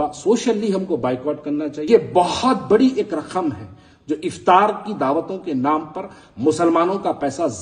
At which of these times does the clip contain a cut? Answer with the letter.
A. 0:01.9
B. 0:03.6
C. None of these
A